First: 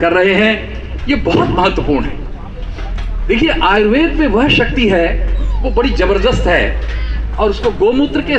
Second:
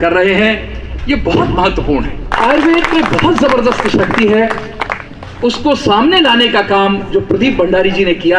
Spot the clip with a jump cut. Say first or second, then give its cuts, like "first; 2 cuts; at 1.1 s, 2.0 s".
second; 1 cut; at 2.3 s